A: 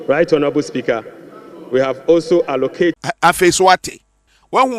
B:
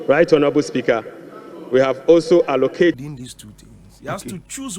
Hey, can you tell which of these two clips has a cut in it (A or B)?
B